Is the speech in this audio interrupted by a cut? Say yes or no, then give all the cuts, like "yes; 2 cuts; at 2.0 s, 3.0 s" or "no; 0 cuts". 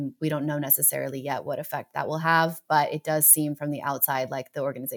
no; 0 cuts